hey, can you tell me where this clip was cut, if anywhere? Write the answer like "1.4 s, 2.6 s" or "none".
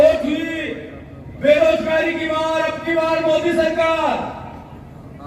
none